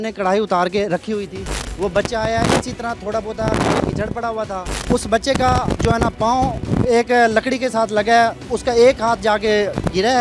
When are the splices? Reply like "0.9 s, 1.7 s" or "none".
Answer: 1.6 s, 4.9 s